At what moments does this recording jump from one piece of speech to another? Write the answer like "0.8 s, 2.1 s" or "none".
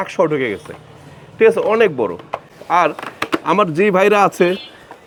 none

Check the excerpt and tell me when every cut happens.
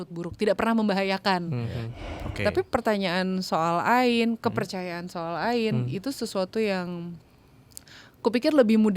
1.9 s

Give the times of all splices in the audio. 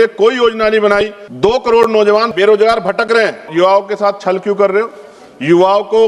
1.2 s, 2.3 s, 3.5 s

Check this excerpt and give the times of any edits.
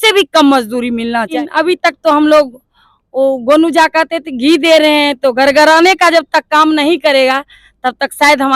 1.3 s

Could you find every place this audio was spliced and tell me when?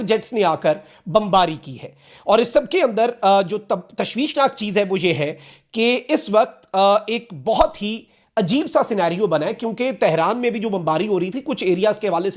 none

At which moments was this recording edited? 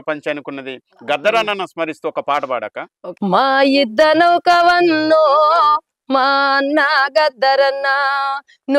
none

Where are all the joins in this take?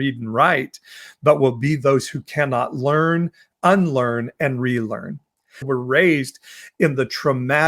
5.6 s

